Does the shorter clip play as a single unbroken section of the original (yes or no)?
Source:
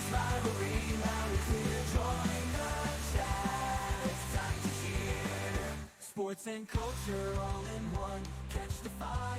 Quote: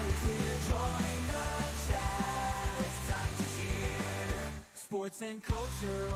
yes